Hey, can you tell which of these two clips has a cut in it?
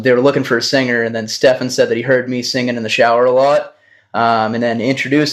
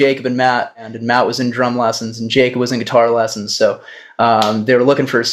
second; 1 cut; at 0.9 s

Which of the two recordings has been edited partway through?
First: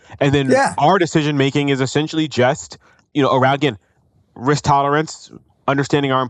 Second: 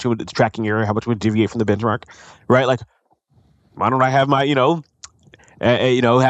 first; 1 cut; at 3.0 s

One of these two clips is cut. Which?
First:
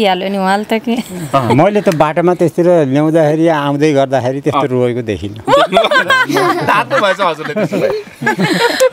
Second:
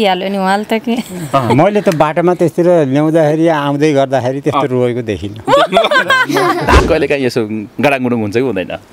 second; 1 cut; at 6.8 s

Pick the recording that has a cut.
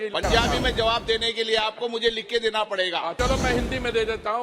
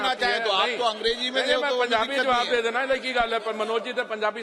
first; 1 cut; at 3.1 s

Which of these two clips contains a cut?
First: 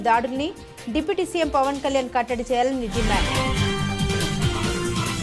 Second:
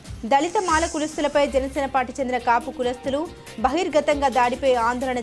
first; 1 cut; at 3.1 s

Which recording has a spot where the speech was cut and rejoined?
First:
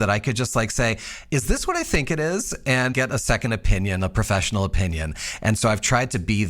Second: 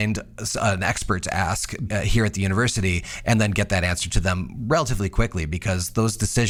first; 1 cut; at 2.9 s

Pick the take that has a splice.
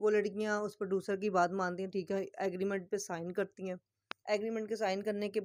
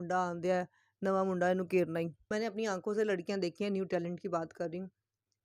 second; 1 cut; at 2.3 s

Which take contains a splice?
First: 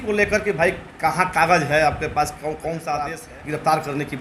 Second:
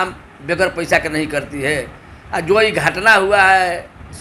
first; 1 cut; at 3.3 s

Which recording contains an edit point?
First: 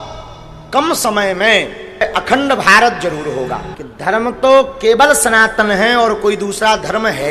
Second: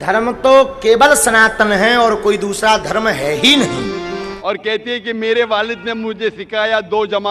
second; 1 cut; at 4.3 s

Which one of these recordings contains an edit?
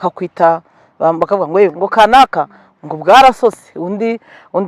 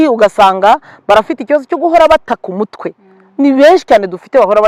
first; 1 cut; at 1.7 s

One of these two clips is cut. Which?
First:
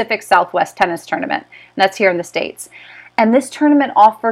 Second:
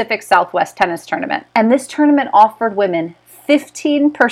second; 1 cut; at 1.4 s

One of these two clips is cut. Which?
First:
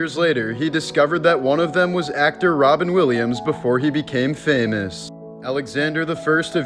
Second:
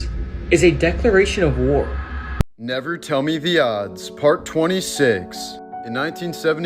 second; 1 cut; at 2.4 s

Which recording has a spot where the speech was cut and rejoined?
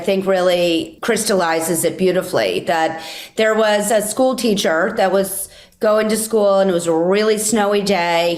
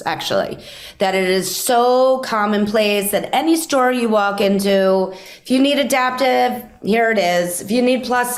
first; 1 cut; at 0.9 s

